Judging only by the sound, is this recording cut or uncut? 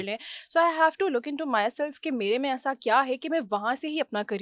uncut